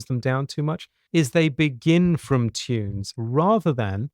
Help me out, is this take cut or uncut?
cut